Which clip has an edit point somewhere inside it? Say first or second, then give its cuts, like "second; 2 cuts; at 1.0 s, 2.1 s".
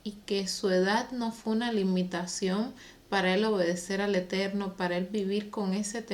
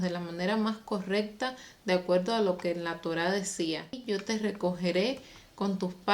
second; 1 cut; at 4.0 s